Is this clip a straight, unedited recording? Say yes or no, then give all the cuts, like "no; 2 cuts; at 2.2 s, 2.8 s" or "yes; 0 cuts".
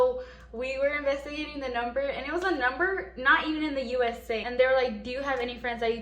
no; 1 cut; at 4.5 s